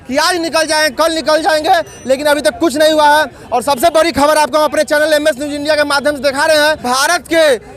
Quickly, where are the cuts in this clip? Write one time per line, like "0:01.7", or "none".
0:06.8